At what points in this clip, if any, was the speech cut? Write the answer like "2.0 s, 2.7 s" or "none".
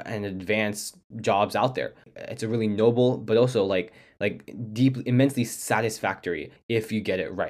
2.1 s, 6.5 s